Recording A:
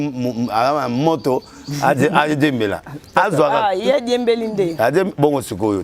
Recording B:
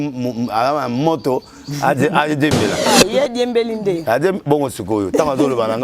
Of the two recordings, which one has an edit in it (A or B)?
B